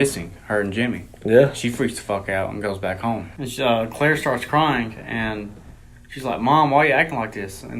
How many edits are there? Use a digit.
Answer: 1